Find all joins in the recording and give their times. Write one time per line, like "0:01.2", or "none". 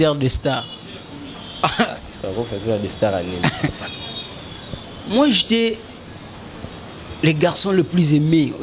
0:03.8

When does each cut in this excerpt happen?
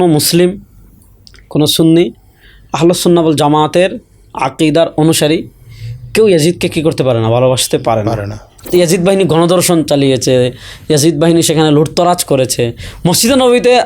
0:08.6

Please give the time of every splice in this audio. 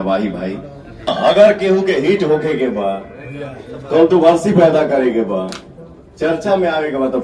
0:01.1

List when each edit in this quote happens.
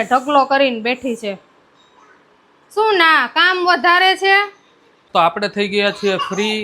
0:04.9

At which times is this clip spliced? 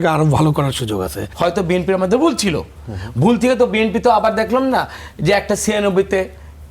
0:01.3

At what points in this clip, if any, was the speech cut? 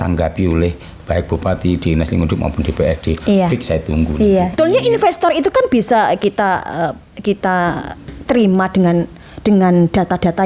0:04.5

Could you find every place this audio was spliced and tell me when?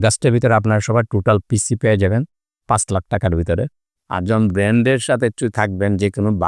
0:03.8

